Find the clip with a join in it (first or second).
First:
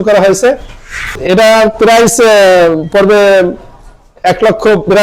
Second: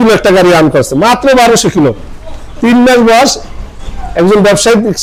first